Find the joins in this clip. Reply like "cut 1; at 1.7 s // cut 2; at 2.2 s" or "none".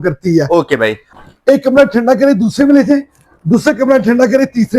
cut 1; at 1.0 s